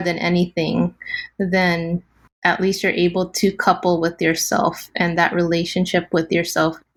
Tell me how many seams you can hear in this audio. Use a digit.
0